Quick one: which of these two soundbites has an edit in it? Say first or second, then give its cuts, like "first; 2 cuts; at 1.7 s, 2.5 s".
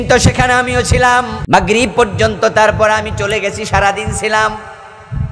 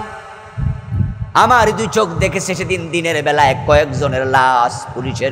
first; 1 cut; at 1.4 s